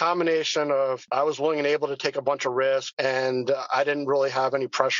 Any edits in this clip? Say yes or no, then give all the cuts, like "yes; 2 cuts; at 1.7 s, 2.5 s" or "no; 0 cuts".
yes; 1 cut; at 1.0 s